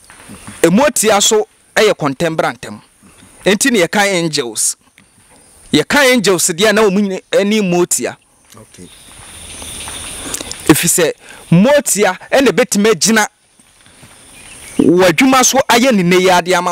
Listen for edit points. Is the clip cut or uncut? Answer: uncut